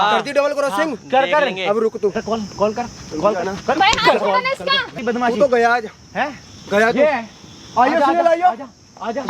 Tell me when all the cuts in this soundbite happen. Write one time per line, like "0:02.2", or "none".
0:04.9